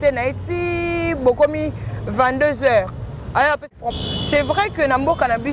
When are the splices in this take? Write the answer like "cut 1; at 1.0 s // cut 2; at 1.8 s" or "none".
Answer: cut 1; at 3.6 s